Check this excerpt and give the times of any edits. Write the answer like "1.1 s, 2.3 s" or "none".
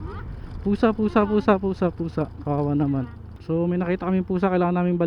3.3 s